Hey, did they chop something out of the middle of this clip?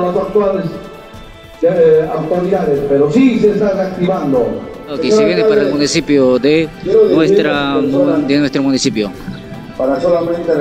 yes; 1 cut; at 5.0 s

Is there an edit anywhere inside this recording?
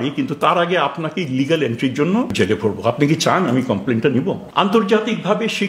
yes; 2 cuts; at 2.3 s, 4.4 s

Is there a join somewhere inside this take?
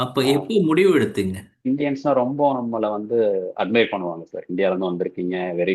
yes; 1 cut; at 1.7 s

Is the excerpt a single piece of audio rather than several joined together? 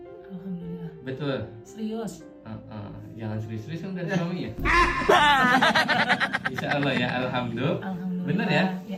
yes; 0 cuts

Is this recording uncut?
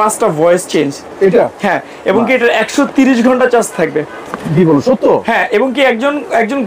yes; 0 cuts

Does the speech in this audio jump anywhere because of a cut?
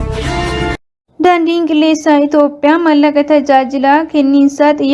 yes; 1 cut; at 1.0 s

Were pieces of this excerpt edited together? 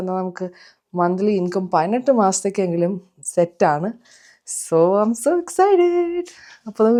no; 0 cuts

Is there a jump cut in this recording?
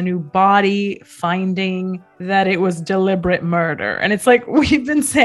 no; 0 cuts

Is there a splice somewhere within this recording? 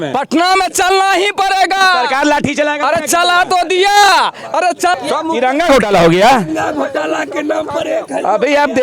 yes; 1 cut; at 4.9 s

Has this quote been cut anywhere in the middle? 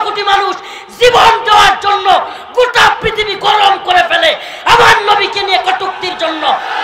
no; 0 cuts

